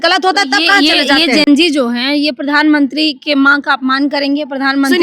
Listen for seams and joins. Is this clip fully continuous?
yes; 0 cuts

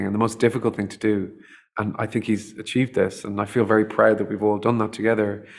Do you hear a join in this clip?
no; 0 cuts

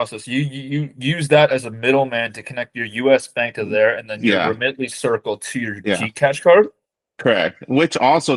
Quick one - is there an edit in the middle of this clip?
no; 0 cuts

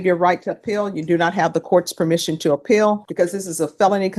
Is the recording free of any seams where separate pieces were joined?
no; 1 cut; at 3.1 s

